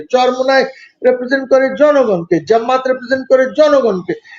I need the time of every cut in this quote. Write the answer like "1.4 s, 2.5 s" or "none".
none